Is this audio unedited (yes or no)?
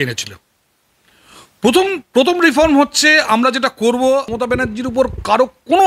no